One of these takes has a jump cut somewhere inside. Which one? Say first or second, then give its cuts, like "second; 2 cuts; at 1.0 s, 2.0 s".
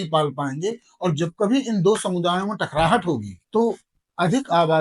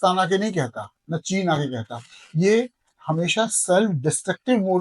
first; 1 cut; at 3.3 s